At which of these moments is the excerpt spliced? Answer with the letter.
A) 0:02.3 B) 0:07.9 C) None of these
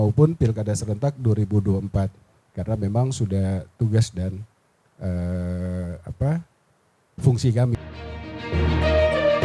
B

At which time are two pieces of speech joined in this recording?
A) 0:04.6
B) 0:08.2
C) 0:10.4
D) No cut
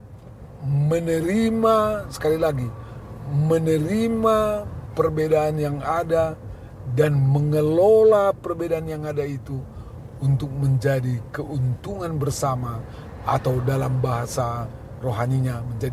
D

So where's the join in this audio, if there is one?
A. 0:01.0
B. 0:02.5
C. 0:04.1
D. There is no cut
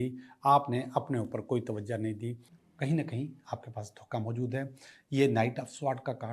B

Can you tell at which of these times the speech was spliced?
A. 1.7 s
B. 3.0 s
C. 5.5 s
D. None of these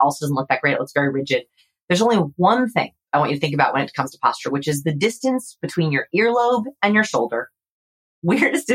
B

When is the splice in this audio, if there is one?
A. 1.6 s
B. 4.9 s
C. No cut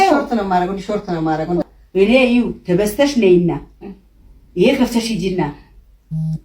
A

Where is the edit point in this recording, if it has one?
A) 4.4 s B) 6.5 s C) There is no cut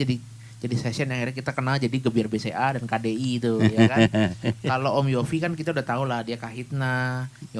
C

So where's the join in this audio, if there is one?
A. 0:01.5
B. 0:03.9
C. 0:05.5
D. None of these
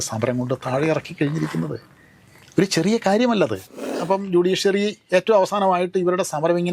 B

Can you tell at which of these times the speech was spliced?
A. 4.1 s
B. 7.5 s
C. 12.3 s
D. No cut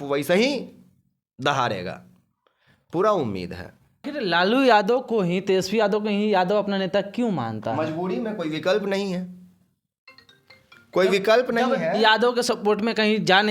A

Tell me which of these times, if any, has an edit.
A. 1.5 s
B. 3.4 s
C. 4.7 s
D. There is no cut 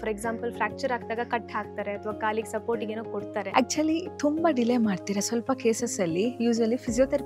B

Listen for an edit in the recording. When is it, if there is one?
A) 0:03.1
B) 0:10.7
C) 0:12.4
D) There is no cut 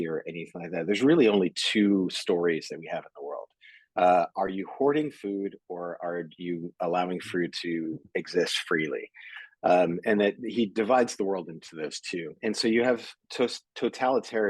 C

